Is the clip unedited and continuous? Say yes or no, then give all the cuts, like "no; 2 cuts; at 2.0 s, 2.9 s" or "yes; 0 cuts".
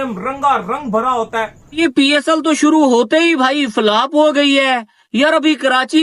no; 1 cut; at 1.9 s